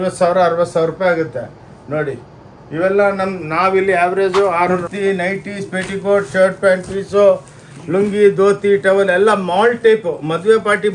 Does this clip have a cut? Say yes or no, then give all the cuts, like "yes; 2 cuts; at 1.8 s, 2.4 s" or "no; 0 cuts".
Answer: yes; 1 cut; at 4.8 s